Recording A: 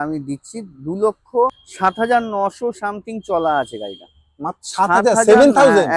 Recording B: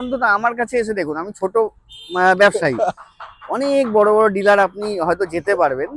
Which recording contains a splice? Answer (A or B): A